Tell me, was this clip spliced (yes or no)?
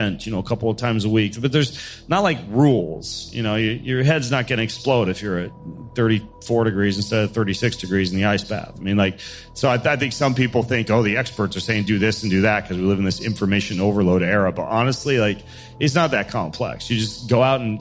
no